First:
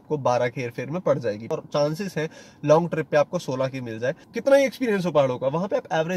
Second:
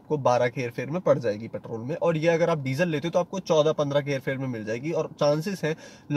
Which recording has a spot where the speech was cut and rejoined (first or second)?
first